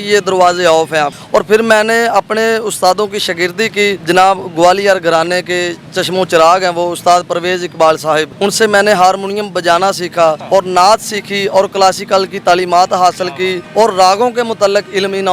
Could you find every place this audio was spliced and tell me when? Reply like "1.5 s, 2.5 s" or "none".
1.2 s, 4.0 s, 8.3 s, 10.4 s, 13.6 s